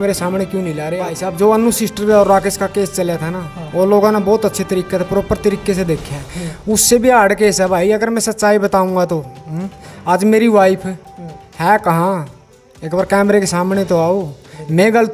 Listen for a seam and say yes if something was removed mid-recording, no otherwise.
yes